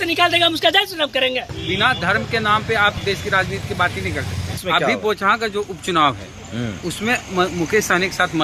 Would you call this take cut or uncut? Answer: cut